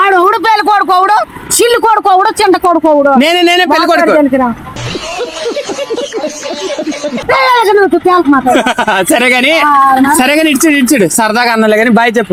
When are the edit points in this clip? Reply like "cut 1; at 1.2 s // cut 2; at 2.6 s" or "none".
none